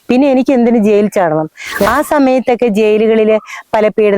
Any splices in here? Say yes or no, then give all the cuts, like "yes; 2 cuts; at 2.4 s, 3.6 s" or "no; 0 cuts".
yes; 1 cut; at 1.9 s